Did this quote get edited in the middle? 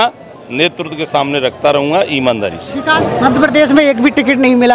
yes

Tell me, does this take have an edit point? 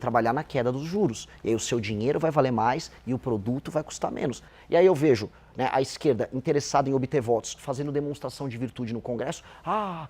yes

